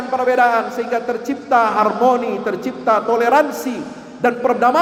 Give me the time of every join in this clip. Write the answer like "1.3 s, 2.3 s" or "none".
none